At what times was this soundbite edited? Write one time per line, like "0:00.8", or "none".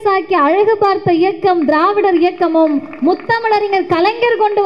none